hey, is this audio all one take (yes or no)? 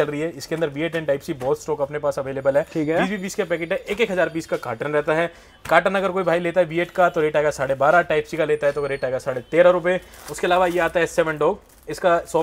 yes